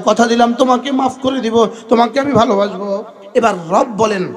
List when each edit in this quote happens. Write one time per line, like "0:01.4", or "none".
0:03.2